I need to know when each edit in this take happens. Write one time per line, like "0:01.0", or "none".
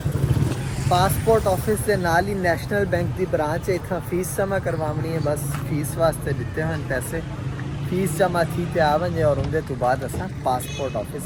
none